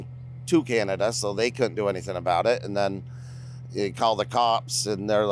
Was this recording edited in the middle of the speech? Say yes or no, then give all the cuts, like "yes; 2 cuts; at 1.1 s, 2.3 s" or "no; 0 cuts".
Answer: no; 0 cuts